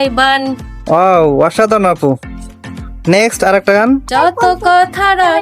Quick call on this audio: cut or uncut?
cut